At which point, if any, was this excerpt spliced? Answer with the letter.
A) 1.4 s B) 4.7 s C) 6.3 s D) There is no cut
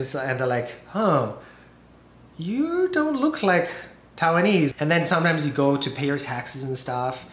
B